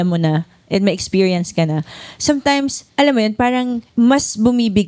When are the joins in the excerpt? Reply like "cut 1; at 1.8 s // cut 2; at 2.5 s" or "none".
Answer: cut 1; at 2.8 s // cut 2; at 3.8 s

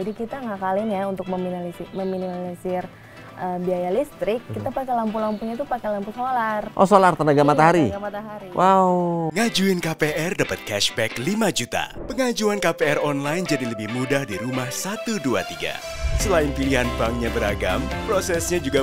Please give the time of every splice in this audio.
cut 1; at 9.3 s

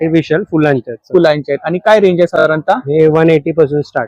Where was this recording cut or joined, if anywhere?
none

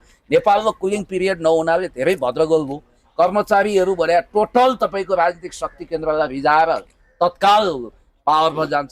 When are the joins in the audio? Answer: none

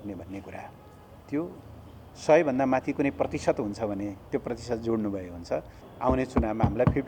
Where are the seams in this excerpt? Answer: cut 1; at 5.8 s

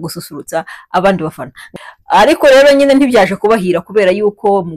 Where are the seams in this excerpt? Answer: cut 1; at 1.5 s

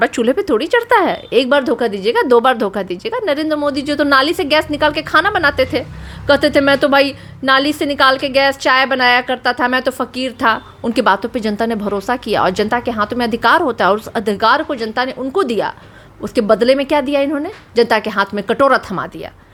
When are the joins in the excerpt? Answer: none

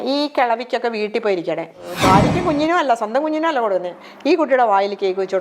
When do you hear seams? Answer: cut 1; at 1.9 s

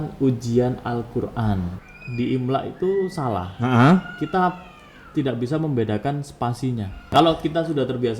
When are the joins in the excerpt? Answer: cut 1; at 1.8 s // cut 2; at 7.1 s

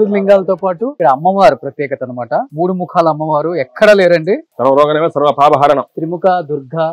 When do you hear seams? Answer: cut 1; at 1.0 s // cut 2; at 2.5 s // cut 3; at 4.5 s // cut 4; at 5.9 s

